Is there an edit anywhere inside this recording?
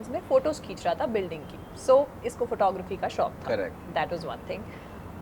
no; 0 cuts

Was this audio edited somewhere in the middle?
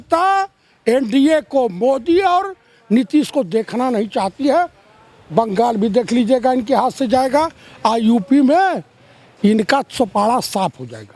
no; 0 cuts

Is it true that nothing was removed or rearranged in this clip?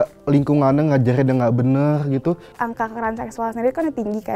no; 1 cut; at 2.5 s

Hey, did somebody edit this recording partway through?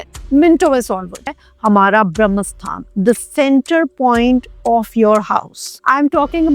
yes; 1 cut; at 1.4 s

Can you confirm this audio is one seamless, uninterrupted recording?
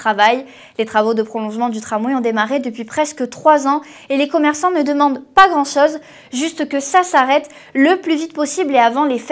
no; 1 cut; at 4.0 s

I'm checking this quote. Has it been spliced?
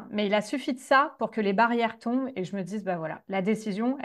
no; 0 cuts

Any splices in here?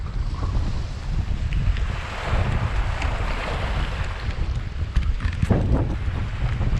no; 0 cuts

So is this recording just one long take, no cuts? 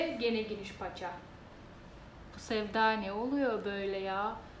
yes; 0 cuts

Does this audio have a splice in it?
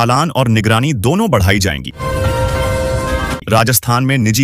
yes; 2 cuts; at 1.9 s, 3.4 s

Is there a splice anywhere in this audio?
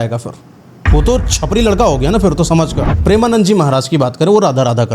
yes; 1 cut; at 2.9 s

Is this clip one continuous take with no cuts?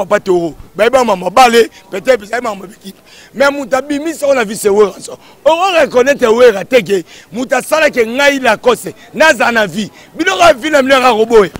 yes; 0 cuts

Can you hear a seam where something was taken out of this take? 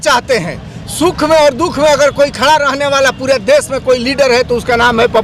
no; 0 cuts

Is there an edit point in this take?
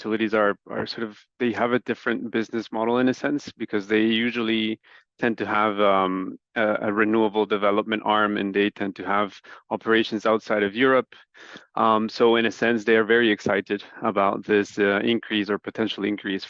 no; 0 cuts

